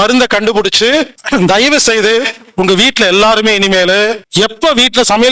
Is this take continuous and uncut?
no; 2 cuts; at 1.2 s, 4.2 s

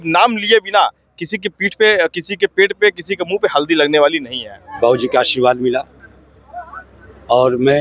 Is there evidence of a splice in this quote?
yes; 1 cut; at 4.6 s

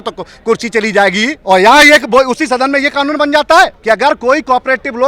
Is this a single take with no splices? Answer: no; 2 cuts; at 1.4 s, 3.8 s

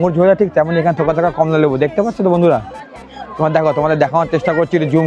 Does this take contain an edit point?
no; 0 cuts

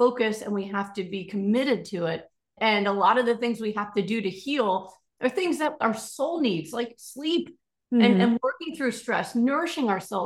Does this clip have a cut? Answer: yes; 1 cut; at 2.5 s

